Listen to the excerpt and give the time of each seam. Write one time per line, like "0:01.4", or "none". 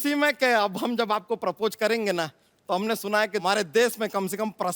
0:03.4